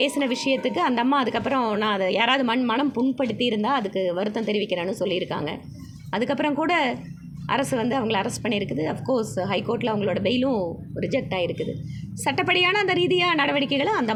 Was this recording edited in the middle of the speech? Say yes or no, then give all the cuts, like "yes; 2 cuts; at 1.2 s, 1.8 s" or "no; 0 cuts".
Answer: no; 0 cuts